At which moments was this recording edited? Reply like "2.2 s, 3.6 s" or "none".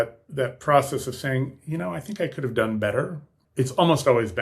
3.4 s